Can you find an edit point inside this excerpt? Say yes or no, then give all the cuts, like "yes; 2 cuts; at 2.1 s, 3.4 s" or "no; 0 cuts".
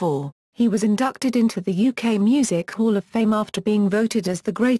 yes; 1 cut; at 3.1 s